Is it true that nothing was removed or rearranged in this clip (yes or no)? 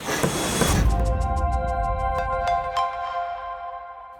yes